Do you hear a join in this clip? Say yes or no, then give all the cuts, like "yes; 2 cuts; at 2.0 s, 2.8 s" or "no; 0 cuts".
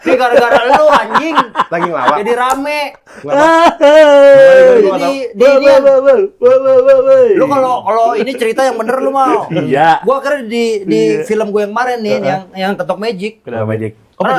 no; 0 cuts